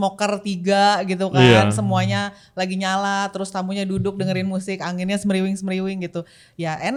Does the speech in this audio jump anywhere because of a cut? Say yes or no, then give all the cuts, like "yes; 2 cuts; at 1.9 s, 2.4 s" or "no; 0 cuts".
no; 0 cuts